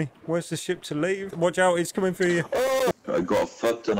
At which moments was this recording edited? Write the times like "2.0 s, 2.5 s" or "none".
1.3 s, 2.9 s